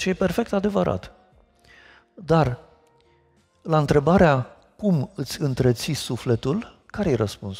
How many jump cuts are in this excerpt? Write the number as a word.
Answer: zero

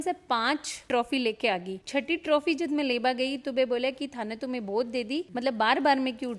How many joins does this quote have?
zero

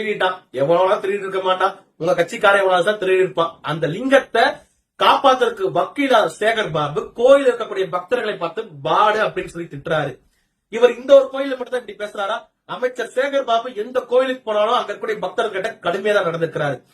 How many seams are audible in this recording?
one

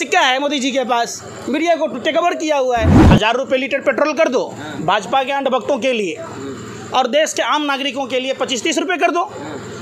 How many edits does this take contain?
one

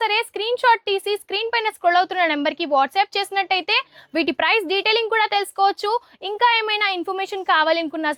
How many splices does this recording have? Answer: zero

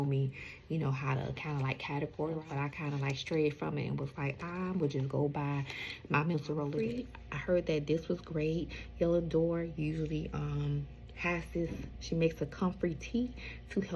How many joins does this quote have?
two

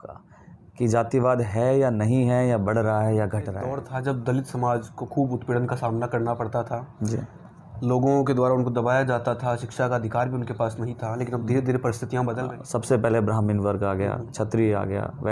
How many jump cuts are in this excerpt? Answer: two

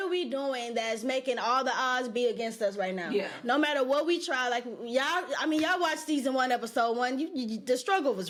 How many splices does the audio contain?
zero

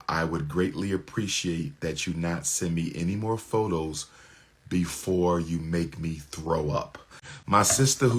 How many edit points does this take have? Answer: one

